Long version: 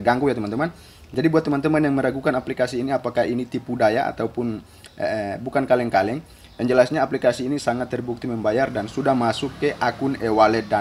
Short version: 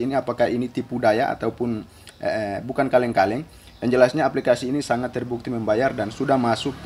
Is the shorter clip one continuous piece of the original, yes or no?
yes